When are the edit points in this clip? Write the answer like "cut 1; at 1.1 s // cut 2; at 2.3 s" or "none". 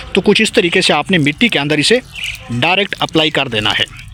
none